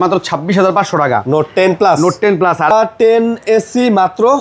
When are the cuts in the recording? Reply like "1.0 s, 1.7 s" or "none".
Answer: 2.7 s

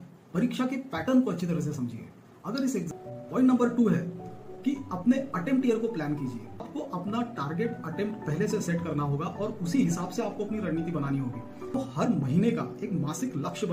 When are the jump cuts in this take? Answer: 2.9 s, 6.6 s, 11.7 s

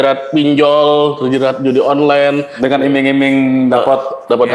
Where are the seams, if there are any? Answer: none

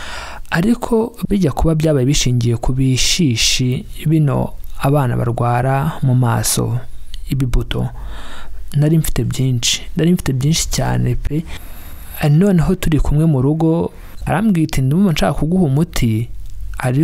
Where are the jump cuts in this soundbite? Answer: 14.1 s

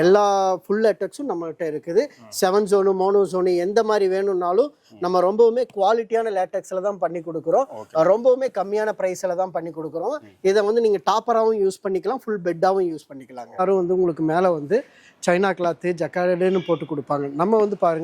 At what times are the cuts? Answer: 13.6 s

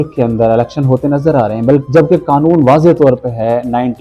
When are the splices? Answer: none

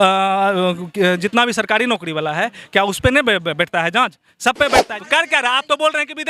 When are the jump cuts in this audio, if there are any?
4.9 s

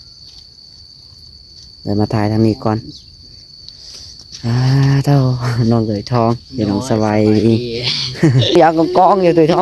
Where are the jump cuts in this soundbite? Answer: 8.6 s

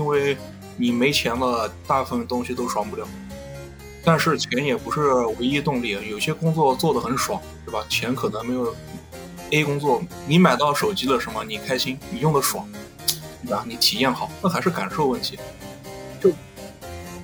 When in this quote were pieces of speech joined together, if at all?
10.1 s

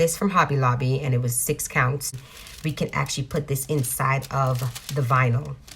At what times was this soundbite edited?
2.0 s

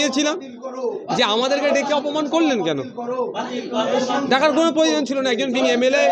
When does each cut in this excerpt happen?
none

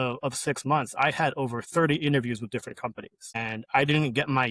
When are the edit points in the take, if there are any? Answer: 3.4 s

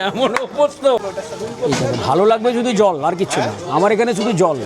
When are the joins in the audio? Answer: 1.1 s

